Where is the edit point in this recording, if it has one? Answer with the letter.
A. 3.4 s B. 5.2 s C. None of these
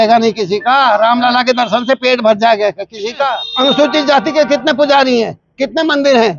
A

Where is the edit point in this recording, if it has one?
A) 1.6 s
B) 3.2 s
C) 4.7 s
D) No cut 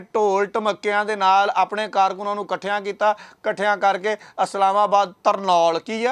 D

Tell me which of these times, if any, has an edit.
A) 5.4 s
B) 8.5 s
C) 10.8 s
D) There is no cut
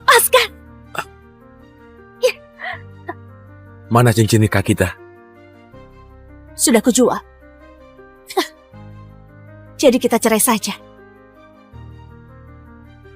C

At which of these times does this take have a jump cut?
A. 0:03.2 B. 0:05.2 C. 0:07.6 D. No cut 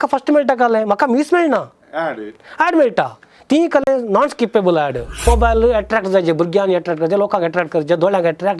B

